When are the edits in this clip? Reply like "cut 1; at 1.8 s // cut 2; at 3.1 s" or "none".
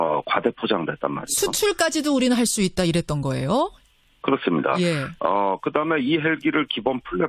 cut 1; at 1.9 s